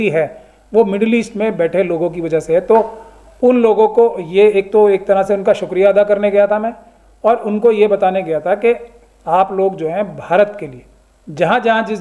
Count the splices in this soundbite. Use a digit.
0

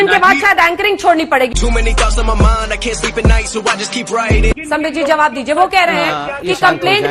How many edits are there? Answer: 1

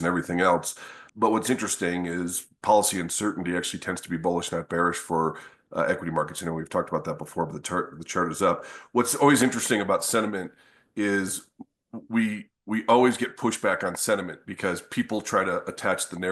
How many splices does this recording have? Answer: 1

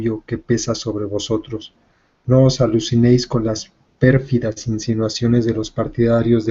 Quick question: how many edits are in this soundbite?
1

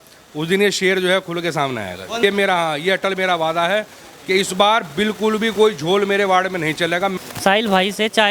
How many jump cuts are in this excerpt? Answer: 2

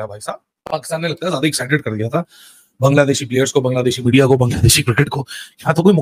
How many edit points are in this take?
0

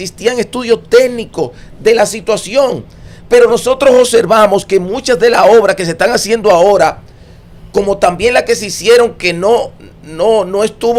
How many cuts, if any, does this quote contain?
0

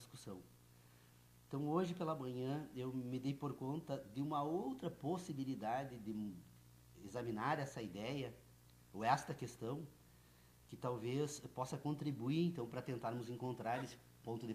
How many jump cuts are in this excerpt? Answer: 1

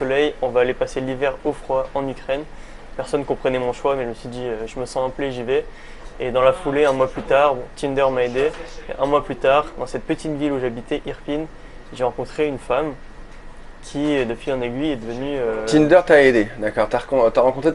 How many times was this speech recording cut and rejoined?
0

